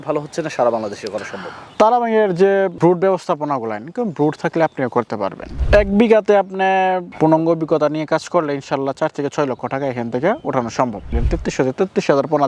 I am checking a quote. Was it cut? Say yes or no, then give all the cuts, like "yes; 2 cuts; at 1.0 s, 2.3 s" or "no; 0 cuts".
yes; 2 cuts; at 5.5 s, 11.2 s